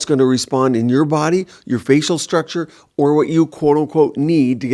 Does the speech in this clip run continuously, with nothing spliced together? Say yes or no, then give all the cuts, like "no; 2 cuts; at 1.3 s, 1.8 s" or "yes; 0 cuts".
yes; 0 cuts